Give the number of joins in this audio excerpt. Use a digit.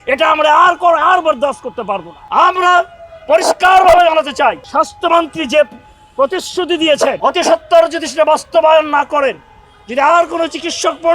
3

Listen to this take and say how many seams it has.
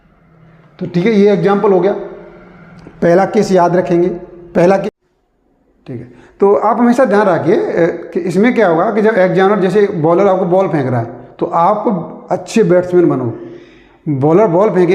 1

